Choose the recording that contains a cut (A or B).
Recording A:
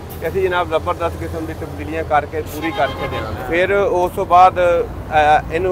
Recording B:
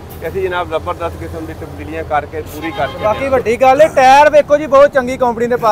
B